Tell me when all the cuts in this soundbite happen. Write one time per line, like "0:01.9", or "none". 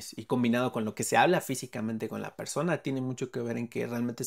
none

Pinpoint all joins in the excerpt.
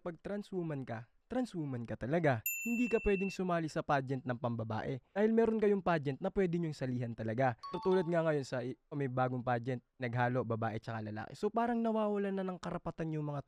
none

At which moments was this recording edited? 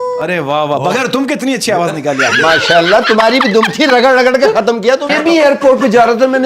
0:05.1

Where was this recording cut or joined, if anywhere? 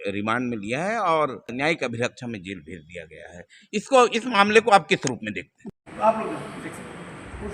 0:01.5
0:05.6

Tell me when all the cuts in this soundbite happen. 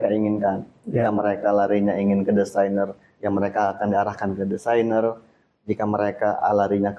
none

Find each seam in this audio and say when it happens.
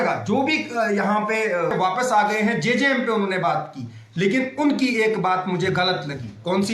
0:01.7

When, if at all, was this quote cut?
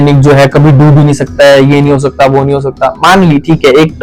none

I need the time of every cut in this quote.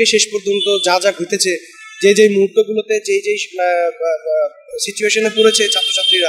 none

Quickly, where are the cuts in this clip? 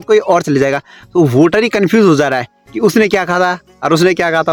none

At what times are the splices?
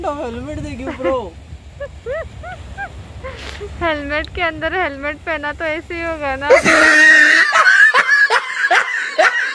0:06.5

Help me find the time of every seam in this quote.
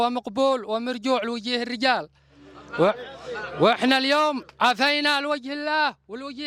none

